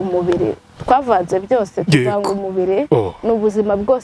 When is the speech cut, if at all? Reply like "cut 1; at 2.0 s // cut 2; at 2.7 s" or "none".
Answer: none